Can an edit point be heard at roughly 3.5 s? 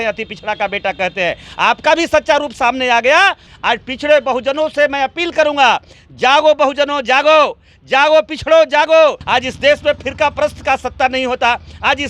yes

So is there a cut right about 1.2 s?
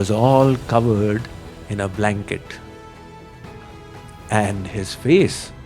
no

